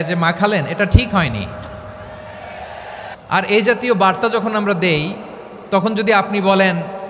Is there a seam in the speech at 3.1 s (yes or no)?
yes